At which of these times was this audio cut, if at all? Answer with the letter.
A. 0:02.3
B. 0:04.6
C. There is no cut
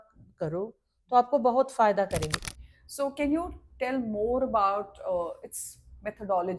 A